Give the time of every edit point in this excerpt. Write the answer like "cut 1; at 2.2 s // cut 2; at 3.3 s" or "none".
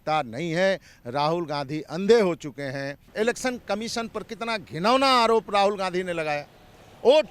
cut 1; at 3.0 s